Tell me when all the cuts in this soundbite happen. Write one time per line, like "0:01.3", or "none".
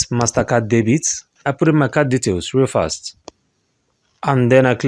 0:01.3